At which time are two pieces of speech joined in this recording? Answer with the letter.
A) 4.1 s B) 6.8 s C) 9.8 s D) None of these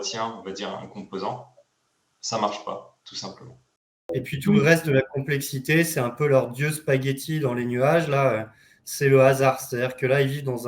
A